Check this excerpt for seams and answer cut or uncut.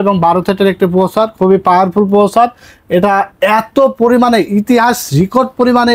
uncut